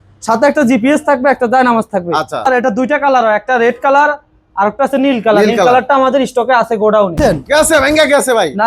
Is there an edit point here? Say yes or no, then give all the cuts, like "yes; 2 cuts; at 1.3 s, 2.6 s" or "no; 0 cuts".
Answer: yes; 2 cuts; at 2.5 s, 7.2 s